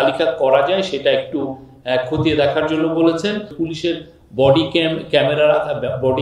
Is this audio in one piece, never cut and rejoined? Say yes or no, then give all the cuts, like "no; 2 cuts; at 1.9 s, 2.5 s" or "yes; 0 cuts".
no; 1 cut; at 3.5 s